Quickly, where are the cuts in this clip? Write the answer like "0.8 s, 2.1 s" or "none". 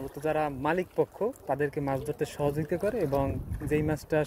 1.4 s